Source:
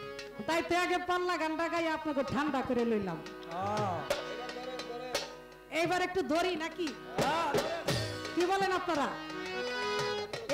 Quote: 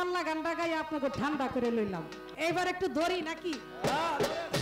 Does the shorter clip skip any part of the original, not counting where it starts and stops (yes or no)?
yes